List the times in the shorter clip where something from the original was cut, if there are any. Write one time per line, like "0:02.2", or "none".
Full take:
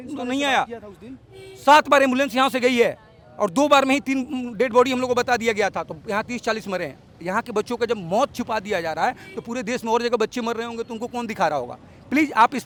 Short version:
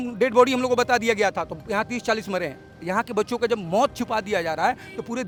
none